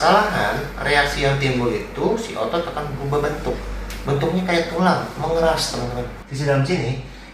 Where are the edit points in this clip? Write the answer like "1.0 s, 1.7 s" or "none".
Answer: 6.2 s